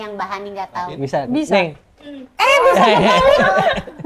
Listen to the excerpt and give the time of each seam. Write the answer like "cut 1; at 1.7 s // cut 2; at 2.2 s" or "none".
cut 1; at 0.9 s